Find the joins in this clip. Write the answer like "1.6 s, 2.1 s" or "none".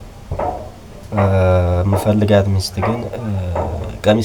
none

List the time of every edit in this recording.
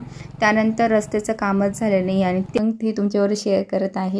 2.6 s

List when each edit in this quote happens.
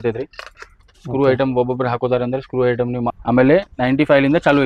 3.2 s

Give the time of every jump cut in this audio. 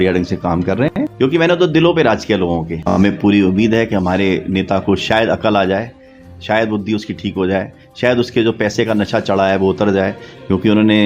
0.9 s, 2.8 s

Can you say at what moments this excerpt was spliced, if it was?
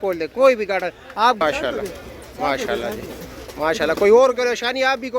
1.4 s

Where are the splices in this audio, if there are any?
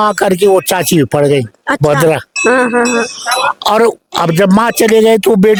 none

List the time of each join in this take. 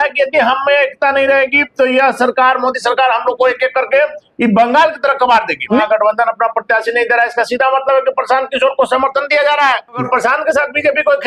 5.8 s, 10.0 s

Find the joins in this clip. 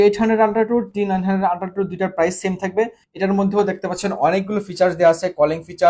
3.0 s

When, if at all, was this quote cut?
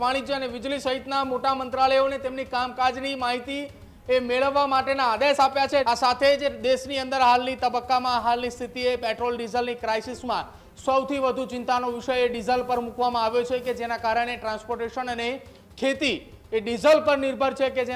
5.8 s

